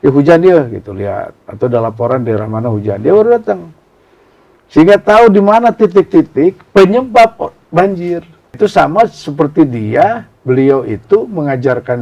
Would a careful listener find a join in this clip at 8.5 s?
yes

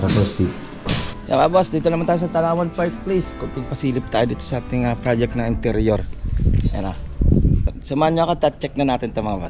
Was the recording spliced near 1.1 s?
yes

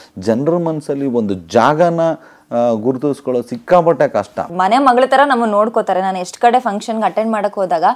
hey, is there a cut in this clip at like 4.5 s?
yes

